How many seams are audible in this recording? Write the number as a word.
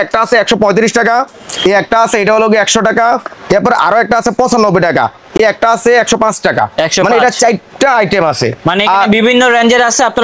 zero